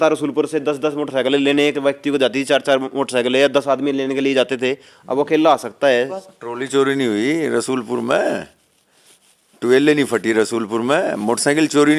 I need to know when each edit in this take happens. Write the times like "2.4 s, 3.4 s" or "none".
6.2 s